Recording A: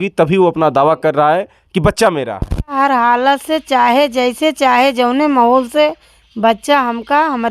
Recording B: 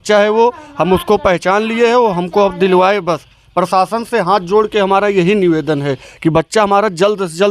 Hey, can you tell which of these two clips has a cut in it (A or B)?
A